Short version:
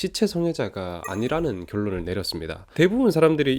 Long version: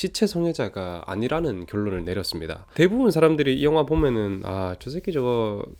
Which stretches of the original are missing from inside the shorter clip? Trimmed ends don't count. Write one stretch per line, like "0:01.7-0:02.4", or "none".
none